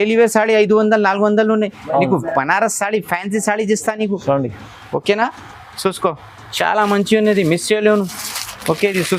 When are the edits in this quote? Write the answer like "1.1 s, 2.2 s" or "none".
none